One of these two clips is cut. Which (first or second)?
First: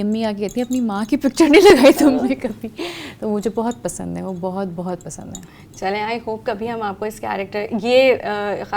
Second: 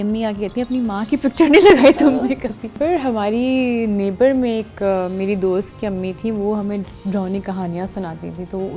second